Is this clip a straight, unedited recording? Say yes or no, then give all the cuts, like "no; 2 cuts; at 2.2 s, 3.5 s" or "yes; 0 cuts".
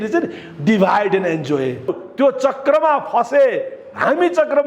no; 1 cut; at 1.9 s